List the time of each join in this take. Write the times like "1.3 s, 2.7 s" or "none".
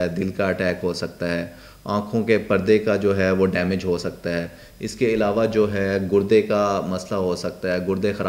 none